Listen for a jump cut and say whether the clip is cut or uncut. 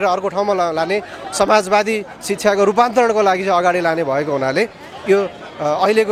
uncut